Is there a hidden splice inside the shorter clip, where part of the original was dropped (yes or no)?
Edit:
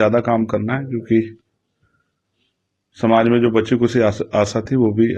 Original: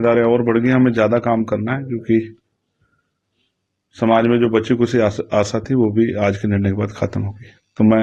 no